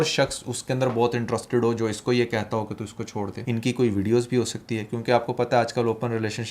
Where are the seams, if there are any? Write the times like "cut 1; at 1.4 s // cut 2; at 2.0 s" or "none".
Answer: cut 1; at 3.4 s